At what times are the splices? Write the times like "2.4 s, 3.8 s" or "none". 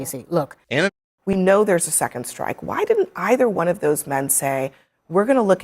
0.9 s